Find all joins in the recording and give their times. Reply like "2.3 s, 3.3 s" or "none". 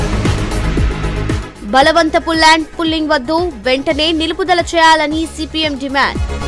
none

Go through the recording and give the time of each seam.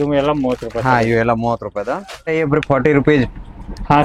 2.1 s

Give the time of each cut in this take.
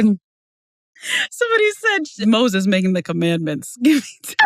2.2 s

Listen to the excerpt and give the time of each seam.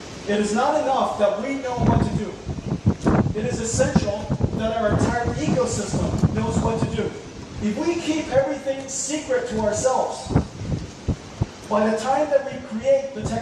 7.5 s

